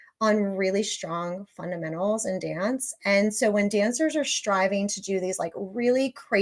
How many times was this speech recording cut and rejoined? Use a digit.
0